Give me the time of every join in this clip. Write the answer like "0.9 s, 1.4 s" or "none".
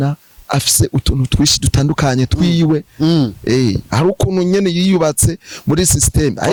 none